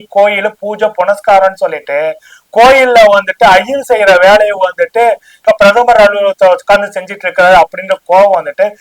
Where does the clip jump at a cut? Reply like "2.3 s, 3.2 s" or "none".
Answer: none